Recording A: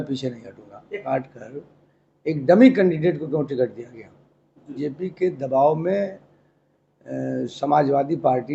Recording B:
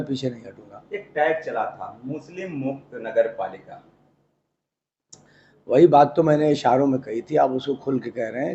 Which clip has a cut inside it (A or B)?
A